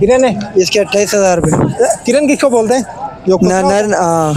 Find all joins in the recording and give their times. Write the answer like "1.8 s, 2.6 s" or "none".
none